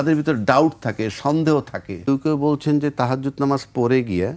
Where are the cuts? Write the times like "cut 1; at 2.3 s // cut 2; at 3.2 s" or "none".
cut 1; at 2.1 s